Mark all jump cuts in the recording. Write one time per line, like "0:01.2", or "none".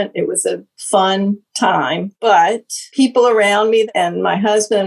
0:02.1
0:02.8
0:03.9